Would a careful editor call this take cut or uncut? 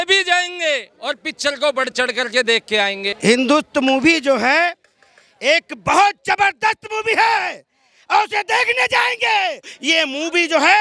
cut